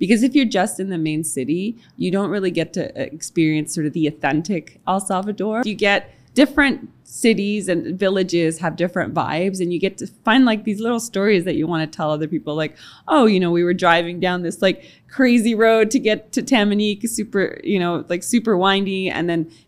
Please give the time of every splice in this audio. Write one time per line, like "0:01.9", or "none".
0:05.6
0:10.2

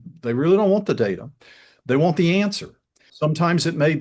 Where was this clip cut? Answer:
0:03.1

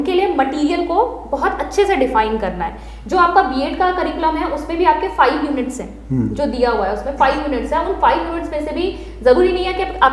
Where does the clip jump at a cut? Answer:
none

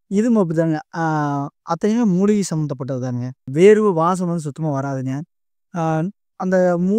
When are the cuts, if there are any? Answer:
0:03.5

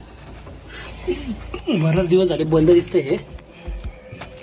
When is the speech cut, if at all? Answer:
none

